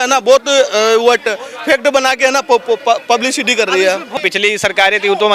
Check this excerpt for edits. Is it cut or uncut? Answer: cut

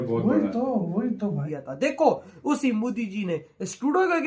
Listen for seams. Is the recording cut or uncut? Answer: cut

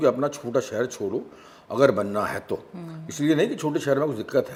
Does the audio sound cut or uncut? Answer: uncut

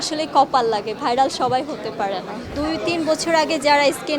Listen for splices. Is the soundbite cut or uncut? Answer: cut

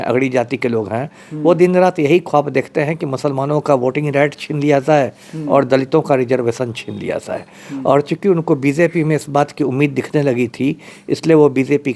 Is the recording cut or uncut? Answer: uncut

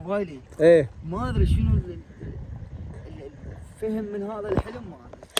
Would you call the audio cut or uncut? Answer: uncut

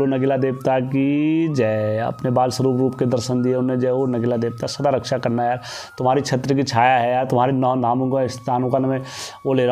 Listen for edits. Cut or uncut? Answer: uncut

